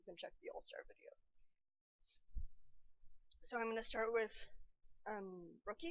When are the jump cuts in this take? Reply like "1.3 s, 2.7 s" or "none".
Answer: 3.3 s